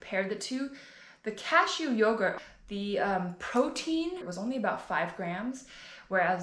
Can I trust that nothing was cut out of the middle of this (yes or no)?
no